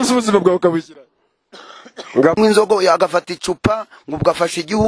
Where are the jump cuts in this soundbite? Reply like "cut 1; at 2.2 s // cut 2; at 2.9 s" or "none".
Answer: cut 1; at 2.4 s